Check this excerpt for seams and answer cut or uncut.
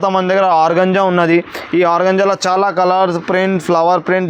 uncut